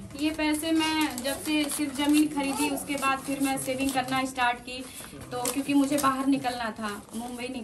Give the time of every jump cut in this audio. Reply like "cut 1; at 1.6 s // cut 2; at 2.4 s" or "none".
none